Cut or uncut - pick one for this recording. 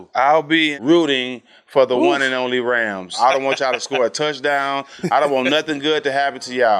cut